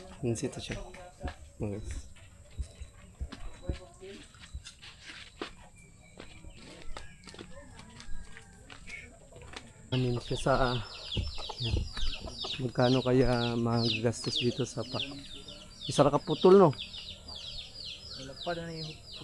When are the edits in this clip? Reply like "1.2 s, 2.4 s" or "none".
9.9 s